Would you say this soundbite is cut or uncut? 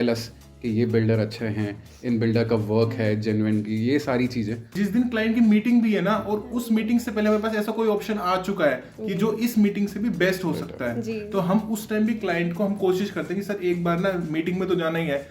cut